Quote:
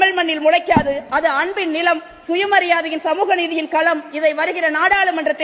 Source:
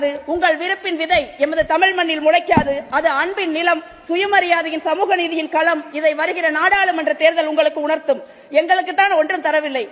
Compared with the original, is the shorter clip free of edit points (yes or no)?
yes